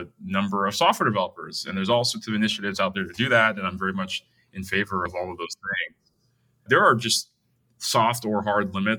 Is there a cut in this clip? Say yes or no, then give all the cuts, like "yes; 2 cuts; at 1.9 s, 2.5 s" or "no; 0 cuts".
yes; 2 cuts; at 5.1 s, 6.6 s